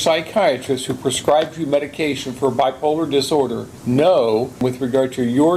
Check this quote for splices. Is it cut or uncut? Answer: cut